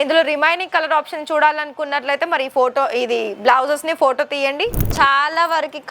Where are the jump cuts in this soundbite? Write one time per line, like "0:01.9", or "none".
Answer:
0:04.9

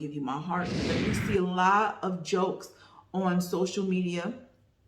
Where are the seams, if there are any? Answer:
0:00.9

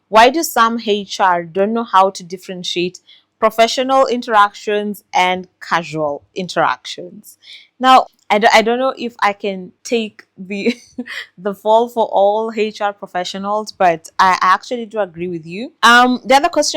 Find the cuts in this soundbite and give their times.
0:15.7

